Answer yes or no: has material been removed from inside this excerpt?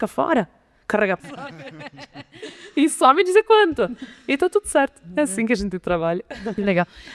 yes